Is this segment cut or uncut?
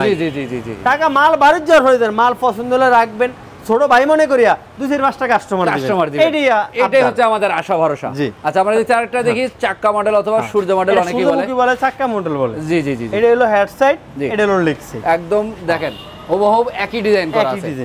uncut